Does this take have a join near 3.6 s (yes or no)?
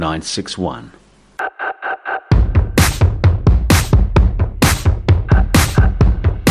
no